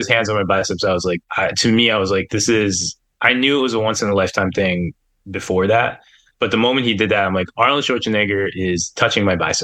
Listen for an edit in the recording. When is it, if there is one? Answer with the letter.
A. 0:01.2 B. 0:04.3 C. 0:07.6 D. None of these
A